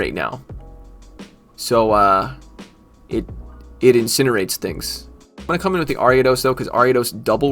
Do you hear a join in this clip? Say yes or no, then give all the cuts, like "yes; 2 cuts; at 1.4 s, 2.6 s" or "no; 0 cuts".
yes; 1 cut; at 5.3 s